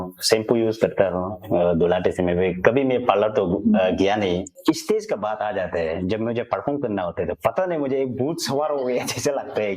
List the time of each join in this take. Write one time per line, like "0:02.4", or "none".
0:04.5